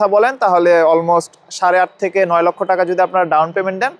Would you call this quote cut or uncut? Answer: uncut